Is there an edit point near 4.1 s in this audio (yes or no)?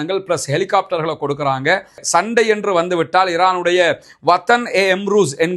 no